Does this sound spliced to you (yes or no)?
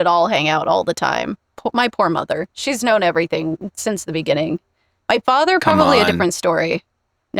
no